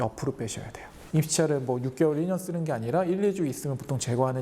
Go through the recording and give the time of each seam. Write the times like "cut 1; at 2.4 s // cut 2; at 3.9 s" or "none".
cut 1; at 0.9 s